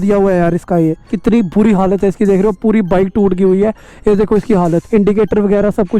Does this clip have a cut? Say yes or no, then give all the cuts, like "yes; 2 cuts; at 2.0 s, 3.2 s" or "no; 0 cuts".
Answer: yes; 2 cuts; at 1.1 s, 4.8 s